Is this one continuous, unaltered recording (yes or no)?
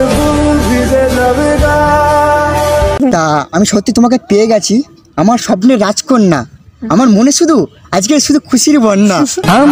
no